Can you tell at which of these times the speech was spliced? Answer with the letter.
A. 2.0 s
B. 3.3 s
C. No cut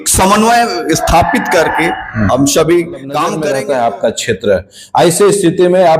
B